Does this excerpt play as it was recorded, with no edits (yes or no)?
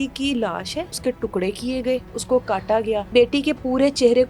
no